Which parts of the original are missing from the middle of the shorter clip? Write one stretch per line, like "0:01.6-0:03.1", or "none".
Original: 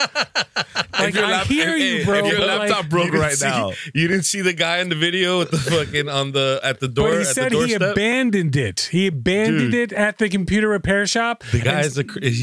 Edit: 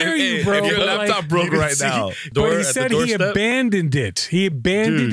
0:03.8-0:06.8